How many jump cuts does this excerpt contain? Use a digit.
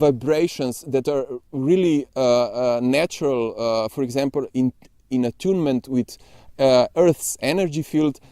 0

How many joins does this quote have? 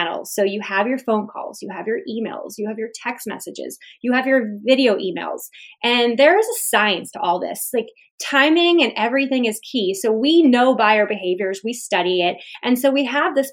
0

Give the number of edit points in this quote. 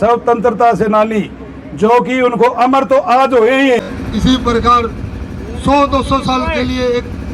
1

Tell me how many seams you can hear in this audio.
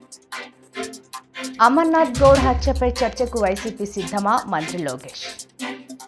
1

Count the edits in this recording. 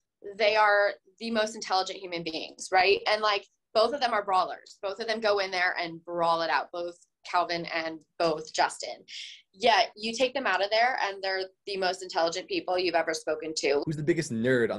1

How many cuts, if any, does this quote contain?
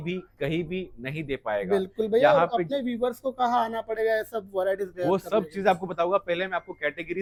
0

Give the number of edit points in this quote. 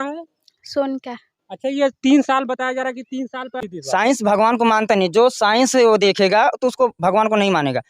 1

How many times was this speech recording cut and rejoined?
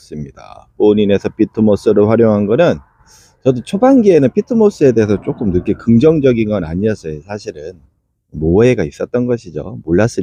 0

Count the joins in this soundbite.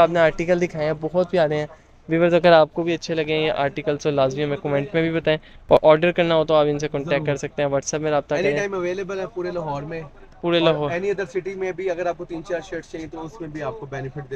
0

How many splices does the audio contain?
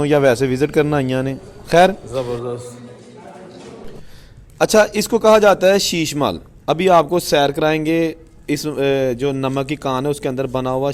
1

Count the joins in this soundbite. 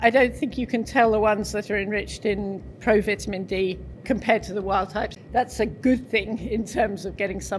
2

